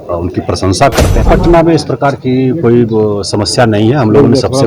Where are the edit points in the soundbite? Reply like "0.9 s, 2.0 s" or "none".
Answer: 1.2 s